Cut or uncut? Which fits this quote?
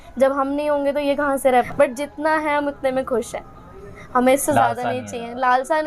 cut